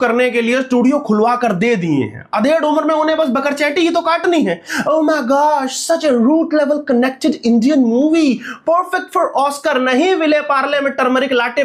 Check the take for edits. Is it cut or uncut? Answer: uncut